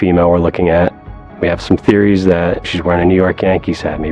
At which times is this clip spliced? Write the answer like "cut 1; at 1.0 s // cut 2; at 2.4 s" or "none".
none